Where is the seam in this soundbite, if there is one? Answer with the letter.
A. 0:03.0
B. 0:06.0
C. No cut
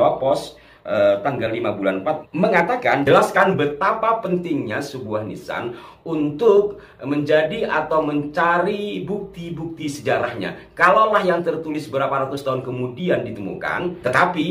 A